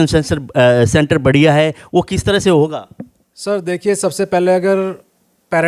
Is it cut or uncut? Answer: uncut